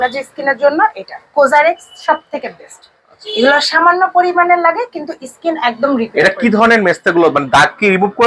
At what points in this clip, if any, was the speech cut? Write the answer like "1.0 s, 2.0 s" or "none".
none